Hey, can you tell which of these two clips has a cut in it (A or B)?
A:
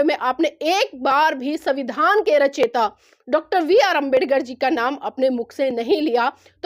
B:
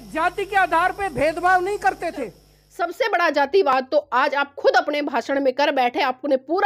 B